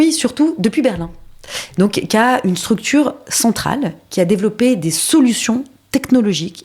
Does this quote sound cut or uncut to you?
uncut